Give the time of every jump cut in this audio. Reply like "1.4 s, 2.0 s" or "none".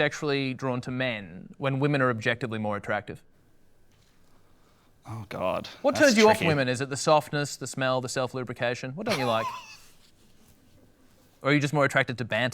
none